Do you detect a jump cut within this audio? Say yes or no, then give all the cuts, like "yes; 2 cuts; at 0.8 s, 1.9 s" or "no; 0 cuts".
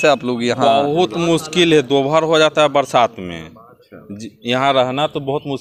no; 0 cuts